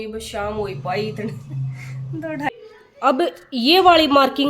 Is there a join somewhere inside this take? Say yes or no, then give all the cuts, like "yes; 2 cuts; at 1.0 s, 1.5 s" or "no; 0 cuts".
yes; 1 cut; at 2.5 s